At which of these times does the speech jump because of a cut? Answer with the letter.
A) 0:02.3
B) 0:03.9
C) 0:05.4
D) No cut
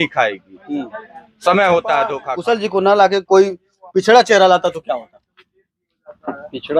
A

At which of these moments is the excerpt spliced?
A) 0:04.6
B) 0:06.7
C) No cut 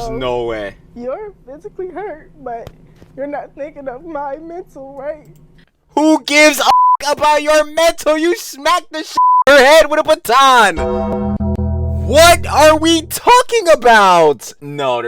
B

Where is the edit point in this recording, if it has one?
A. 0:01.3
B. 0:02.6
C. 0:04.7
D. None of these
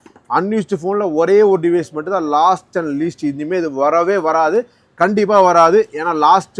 D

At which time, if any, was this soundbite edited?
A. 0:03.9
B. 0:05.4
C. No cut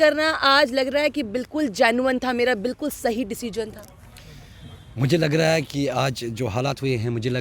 C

